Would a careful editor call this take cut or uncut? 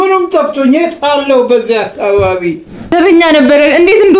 cut